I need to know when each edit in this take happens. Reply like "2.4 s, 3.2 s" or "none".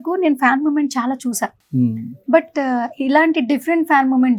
none

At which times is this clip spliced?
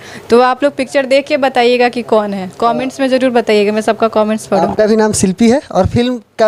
none

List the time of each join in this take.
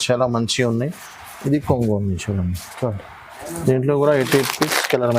none

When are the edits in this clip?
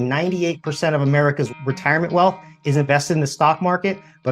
1.5 s

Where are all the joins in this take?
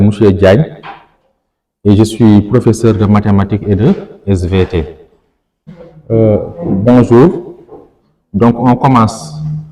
5.9 s

